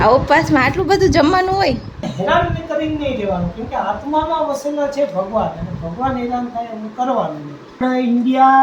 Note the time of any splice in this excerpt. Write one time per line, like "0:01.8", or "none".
0:02.1
0:07.8